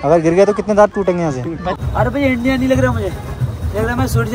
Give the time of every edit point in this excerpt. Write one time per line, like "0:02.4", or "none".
0:01.7